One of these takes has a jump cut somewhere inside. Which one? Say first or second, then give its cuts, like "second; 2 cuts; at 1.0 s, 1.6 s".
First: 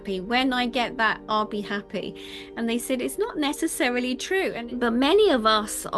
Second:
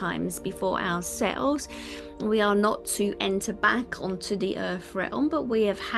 first; 1 cut; at 4.6 s